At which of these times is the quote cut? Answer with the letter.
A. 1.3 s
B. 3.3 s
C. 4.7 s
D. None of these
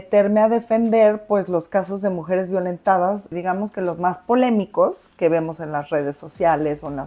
B